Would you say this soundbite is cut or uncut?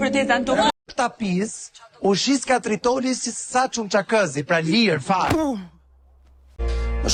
uncut